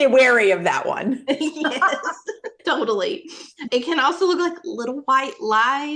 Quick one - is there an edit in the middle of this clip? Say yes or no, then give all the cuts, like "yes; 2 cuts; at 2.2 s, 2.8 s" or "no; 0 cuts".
no; 0 cuts